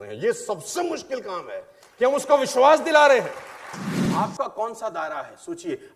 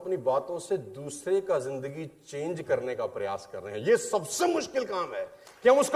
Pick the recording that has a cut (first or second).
first